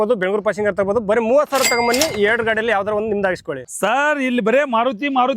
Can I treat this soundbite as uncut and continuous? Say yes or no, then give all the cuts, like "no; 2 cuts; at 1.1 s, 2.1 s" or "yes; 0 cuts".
no; 1 cut; at 3.7 s